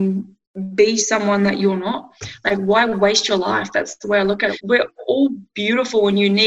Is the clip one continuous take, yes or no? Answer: no